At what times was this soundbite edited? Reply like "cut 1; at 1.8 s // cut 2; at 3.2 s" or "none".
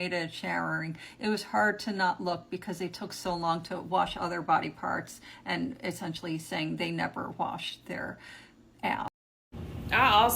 cut 1; at 9.1 s

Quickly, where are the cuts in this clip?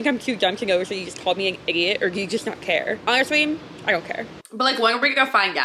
cut 1; at 3.0 s // cut 2; at 4.4 s

